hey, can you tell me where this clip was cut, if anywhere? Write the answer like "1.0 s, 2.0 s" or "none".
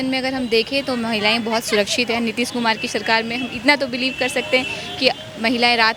none